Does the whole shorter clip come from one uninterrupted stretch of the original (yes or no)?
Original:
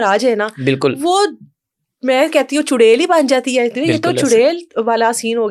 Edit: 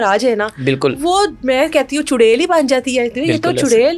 no